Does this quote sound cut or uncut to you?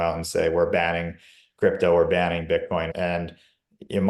cut